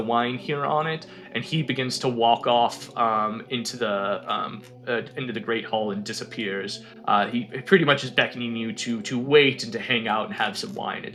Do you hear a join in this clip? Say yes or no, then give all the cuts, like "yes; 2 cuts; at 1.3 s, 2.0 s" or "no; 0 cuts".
no; 0 cuts